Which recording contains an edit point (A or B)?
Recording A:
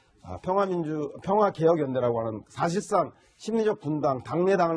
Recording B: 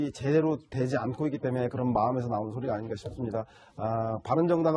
B